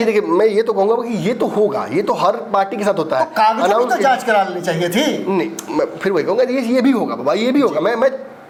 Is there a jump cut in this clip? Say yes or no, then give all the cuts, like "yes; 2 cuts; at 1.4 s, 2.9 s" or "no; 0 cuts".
no; 0 cuts